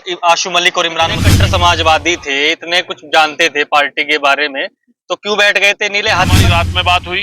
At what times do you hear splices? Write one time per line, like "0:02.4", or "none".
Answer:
0:01.3
0:06.4